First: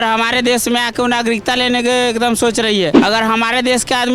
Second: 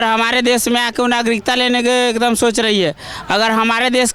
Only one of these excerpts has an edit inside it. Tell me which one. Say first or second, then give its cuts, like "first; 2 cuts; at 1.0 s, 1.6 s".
first; 1 cut; at 3.0 s